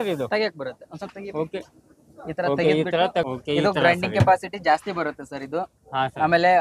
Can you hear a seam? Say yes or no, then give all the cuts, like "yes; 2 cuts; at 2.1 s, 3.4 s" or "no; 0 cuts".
yes; 1 cut; at 3.2 s